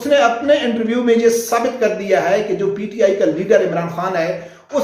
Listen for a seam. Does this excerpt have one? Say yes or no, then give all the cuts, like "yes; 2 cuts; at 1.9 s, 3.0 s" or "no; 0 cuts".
no; 0 cuts